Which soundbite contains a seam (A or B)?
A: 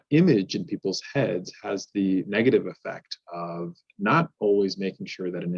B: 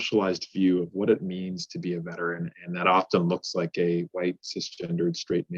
B